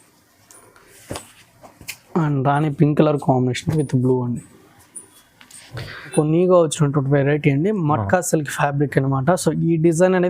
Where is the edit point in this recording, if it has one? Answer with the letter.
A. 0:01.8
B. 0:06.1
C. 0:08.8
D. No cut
B